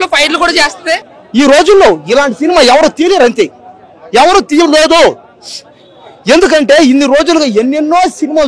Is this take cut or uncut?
cut